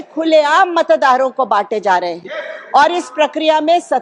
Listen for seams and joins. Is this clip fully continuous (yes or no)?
yes